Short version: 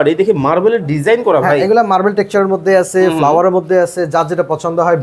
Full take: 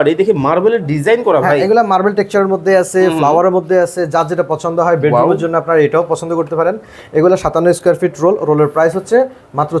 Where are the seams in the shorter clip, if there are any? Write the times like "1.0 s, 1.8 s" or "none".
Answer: none